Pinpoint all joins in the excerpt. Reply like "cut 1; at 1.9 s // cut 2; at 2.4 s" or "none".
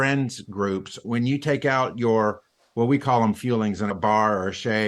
cut 1; at 1.0 s // cut 2; at 3.9 s